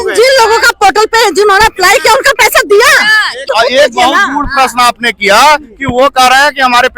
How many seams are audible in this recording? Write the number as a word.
one